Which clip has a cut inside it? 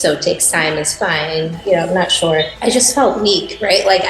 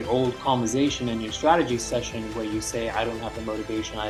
first; 2 cuts; at 1.6 s, 2.5 s

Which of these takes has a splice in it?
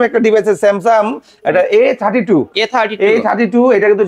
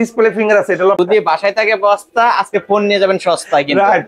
second; 1 cut; at 1.0 s

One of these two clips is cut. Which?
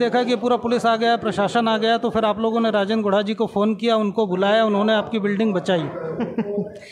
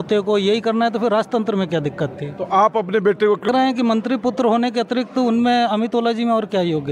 second; 1 cut; at 3.5 s

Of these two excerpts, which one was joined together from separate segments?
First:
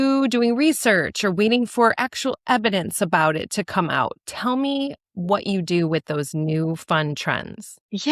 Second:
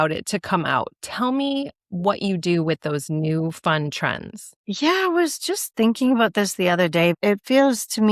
second; 1 cut; at 7.2 s

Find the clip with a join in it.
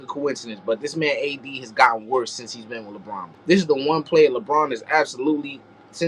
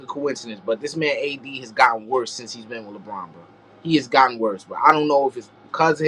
first; 1 cut; at 3.3 s

